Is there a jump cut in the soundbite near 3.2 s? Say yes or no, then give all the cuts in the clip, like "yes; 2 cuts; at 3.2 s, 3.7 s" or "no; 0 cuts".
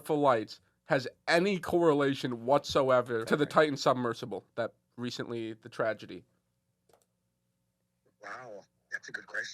yes; 1 cut; at 3.2 s